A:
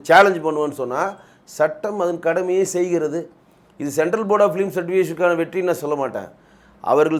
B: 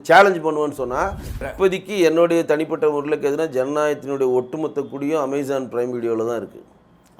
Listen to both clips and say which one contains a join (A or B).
B